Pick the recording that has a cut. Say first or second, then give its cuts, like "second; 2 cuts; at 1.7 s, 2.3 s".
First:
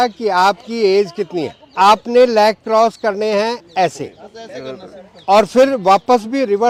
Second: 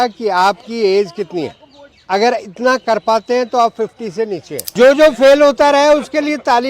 second; 2 cuts; at 1.8 s, 4.6 s